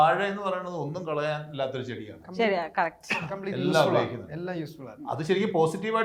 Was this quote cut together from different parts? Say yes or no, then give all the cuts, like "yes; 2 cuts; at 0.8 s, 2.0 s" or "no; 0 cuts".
no; 0 cuts